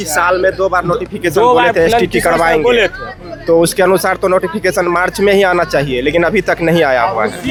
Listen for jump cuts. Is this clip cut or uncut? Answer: uncut